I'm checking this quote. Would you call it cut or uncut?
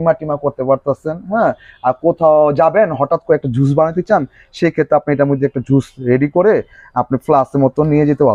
uncut